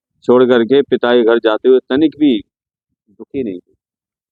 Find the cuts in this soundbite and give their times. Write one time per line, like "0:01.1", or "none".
none